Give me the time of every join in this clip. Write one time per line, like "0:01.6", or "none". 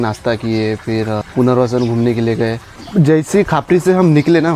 none